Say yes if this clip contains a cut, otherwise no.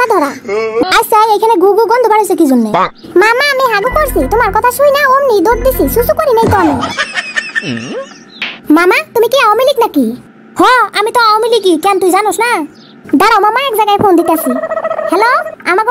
yes